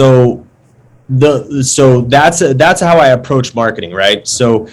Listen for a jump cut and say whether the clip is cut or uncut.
uncut